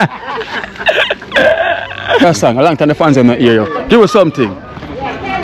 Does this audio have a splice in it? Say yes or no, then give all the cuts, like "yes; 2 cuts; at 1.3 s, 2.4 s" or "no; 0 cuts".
yes; 1 cut; at 2.2 s